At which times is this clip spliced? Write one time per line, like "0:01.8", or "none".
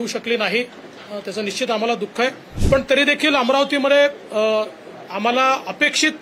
0:02.5